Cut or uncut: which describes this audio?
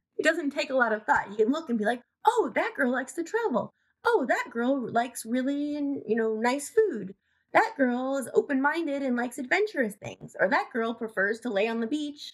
uncut